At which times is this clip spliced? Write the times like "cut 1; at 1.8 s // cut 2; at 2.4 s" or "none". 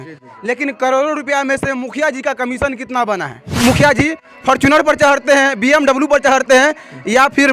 cut 1; at 3.5 s